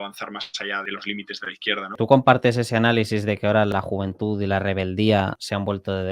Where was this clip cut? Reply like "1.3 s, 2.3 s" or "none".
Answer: 0.8 s, 1.9 s, 3.7 s